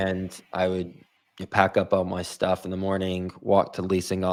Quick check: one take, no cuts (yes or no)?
yes